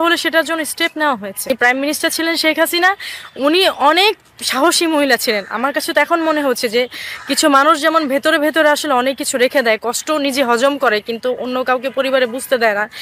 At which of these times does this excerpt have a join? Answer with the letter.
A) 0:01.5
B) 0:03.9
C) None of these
A